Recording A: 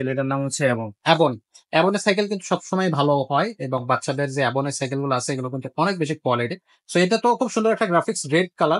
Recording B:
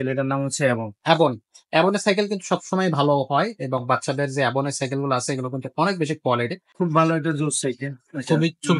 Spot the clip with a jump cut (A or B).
B